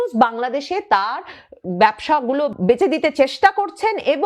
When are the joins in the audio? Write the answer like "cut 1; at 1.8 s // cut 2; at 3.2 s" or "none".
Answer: cut 1; at 2.5 s